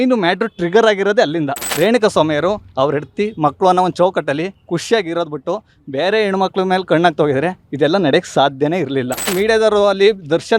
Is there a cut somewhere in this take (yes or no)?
yes